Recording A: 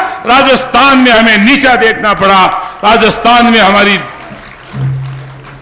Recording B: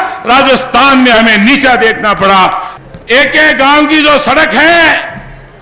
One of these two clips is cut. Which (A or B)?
B